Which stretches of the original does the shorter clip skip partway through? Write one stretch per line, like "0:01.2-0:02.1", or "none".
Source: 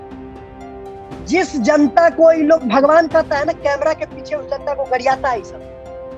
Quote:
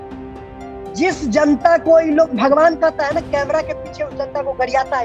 0:00.9-0:01.3